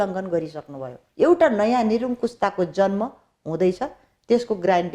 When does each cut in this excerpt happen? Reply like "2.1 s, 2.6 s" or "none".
1.0 s